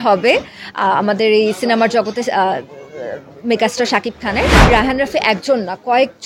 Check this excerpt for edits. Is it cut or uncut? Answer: cut